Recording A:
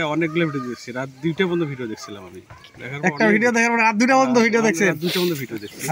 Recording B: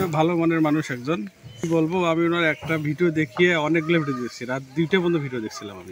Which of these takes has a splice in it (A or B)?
B